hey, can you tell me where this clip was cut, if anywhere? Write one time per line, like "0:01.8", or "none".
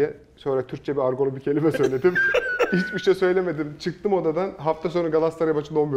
0:02.7